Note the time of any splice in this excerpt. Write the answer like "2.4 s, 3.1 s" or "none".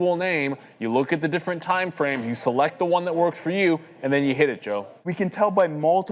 4.9 s